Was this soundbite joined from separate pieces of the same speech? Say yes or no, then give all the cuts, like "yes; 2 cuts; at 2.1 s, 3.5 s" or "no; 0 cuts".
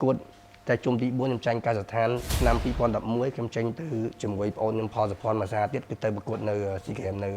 yes; 1 cut; at 2.3 s